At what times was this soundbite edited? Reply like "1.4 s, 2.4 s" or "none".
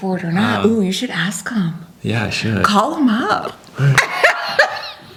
none